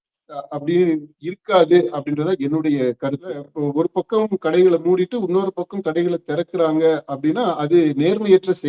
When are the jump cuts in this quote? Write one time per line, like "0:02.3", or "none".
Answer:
0:03.5

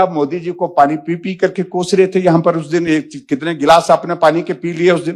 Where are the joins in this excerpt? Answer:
none

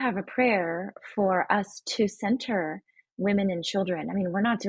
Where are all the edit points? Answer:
none

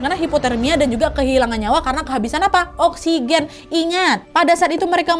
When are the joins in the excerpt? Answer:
none

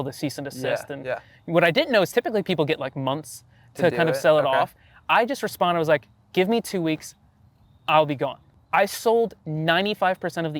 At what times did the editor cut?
0:08.5

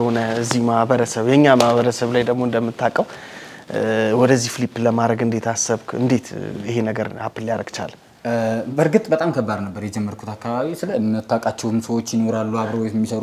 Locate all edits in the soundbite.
none

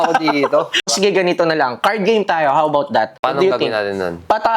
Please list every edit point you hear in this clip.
0:00.9
0:03.2

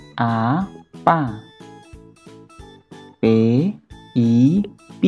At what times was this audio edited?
0:01.7
0:03.2

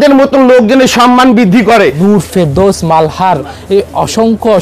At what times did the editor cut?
0:02.0

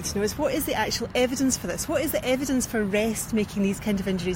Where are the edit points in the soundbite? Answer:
none

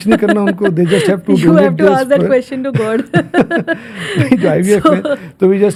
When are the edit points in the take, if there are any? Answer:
none

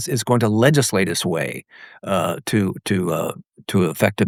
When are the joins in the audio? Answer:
none

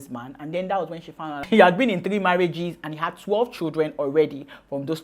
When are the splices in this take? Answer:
0:01.4

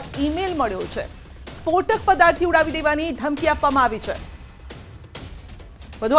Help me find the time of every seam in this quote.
none

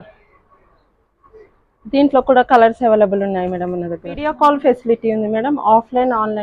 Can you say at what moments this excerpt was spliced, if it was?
0:04.3

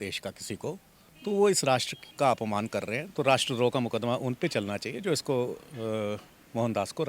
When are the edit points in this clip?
0:02.0

